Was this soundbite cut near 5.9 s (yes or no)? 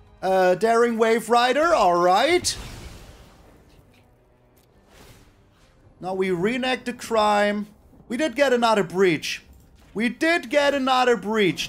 yes